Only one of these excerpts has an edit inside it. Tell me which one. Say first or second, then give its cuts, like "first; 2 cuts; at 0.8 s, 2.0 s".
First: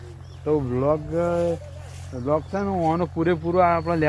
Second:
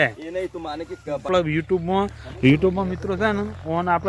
second; 1 cut; at 1.3 s